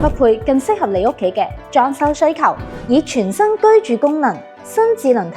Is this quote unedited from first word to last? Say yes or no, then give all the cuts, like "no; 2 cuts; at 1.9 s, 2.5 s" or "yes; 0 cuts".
no; 1 cut; at 2.7 s